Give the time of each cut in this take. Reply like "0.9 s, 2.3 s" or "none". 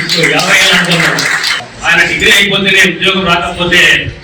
1.4 s